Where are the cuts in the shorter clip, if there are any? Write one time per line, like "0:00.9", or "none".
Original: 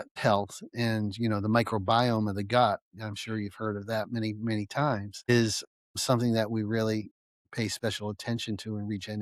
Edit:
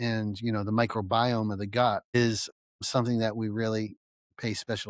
0:02.0